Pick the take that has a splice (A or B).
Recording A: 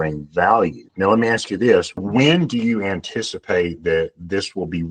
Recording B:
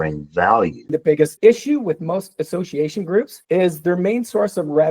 B